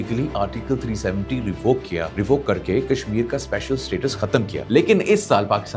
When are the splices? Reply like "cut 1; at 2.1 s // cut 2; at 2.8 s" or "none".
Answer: cut 1; at 2.1 s // cut 2; at 4.6 s

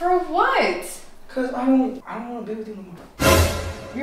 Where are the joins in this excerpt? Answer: none

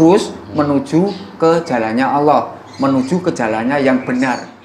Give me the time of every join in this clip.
none

